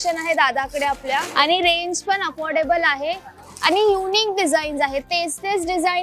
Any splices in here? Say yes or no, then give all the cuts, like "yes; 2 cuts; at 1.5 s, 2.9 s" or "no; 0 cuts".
yes; 1 cut; at 1.3 s